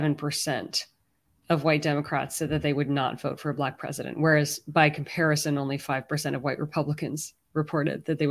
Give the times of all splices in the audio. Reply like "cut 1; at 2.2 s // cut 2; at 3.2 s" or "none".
none